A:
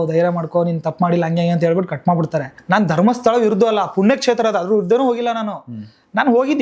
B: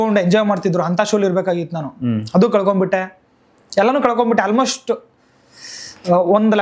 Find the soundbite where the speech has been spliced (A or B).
A